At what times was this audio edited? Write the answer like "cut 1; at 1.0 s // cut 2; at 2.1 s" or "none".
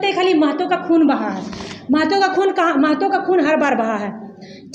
none